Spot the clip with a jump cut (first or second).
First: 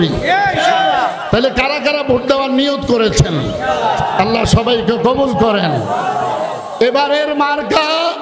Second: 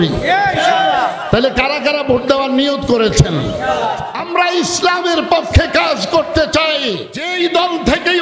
second